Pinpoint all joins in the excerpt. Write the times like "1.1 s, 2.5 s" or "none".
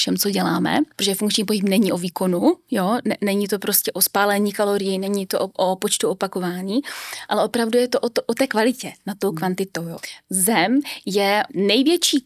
1.0 s, 9.9 s, 11.5 s